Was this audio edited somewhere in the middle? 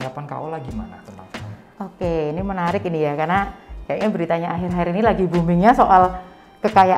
no; 0 cuts

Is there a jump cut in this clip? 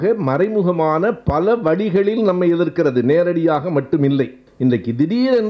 yes; 1 cut; at 4.4 s

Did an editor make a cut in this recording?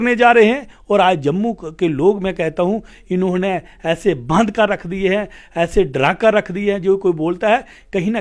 no; 0 cuts

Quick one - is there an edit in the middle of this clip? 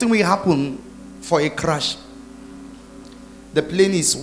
yes; 1 cut; at 3.1 s

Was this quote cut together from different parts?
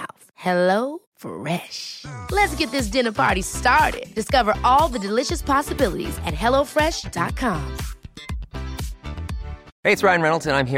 yes; 1 cut; at 9.7 s

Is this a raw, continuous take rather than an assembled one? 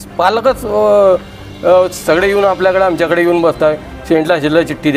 yes; 0 cuts

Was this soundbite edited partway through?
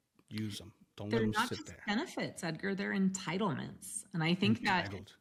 no; 0 cuts

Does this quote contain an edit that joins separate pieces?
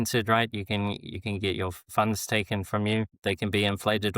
yes; 2 cuts; at 1.8 s, 3.2 s

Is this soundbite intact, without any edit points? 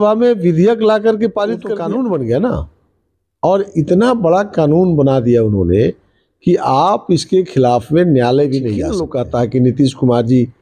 no; 2 cuts; at 1.7 s, 9.0 s

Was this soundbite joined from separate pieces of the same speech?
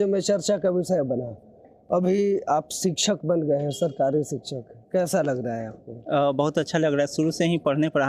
no; 0 cuts

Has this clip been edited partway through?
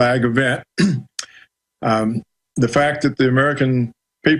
no; 0 cuts

